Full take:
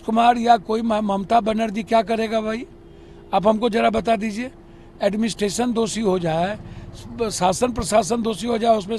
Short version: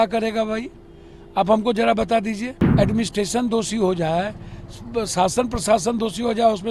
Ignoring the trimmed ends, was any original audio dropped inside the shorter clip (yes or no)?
yes